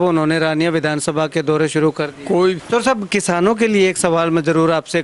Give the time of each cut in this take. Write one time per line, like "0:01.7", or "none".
0:02.6